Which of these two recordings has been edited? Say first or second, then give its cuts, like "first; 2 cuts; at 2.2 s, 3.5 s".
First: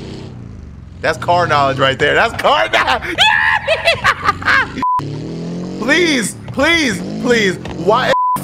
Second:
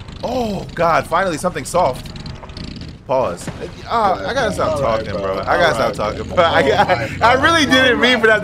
first; 1 cut; at 4.9 s